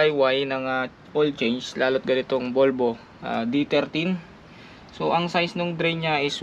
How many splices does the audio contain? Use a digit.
0